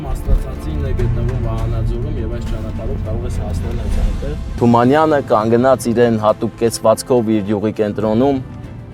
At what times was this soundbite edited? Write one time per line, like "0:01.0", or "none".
0:04.6